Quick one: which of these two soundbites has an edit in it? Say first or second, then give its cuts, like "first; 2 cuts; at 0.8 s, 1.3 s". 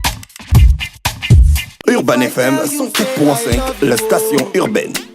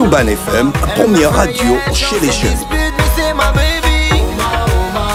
first; 1 cut; at 1.6 s